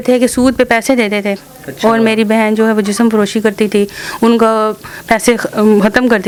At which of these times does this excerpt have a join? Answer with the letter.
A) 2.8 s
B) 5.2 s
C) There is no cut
C